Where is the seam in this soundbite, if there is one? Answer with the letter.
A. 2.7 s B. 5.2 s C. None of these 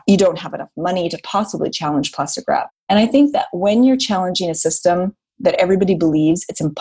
A